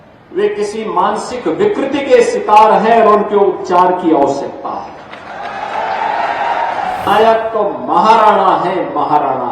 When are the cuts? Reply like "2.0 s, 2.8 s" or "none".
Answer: 7.1 s